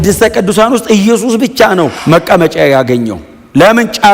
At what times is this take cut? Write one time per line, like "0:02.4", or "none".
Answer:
0:02.0